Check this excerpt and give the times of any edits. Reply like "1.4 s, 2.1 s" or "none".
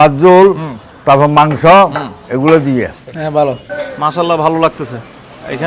3.0 s